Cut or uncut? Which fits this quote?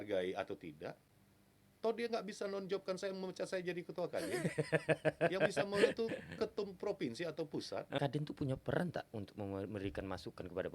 cut